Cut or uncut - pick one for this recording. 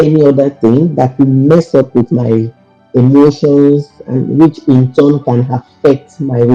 uncut